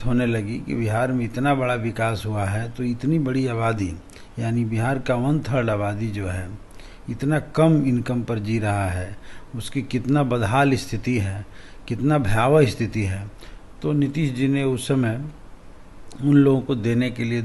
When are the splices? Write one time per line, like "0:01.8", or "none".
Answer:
none